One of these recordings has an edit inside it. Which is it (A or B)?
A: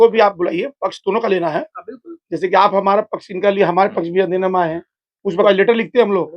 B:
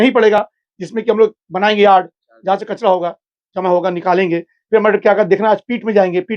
A